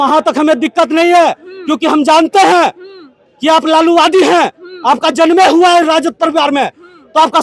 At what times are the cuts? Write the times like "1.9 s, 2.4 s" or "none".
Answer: none